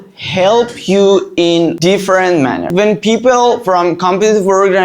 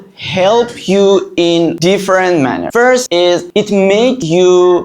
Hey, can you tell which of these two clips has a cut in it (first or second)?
first